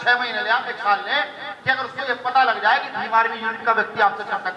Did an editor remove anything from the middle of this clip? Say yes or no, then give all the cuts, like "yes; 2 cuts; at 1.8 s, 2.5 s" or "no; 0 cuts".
no; 0 cuts